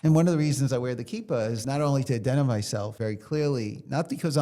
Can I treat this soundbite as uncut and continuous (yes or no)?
no